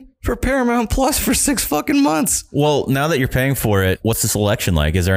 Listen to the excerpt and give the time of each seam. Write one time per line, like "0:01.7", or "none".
0:02.4
0:04.0